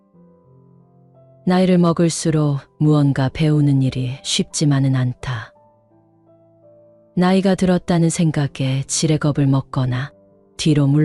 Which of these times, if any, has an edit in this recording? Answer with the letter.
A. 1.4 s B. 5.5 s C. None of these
C